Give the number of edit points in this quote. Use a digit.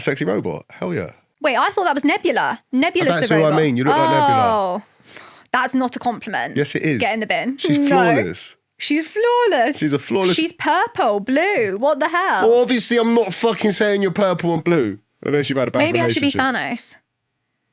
1